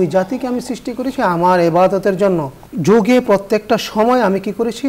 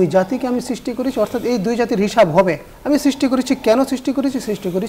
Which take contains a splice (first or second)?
first